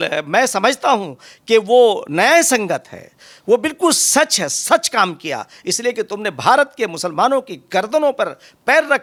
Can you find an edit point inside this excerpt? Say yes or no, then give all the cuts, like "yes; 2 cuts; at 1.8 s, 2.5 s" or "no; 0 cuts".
no; 0 cuts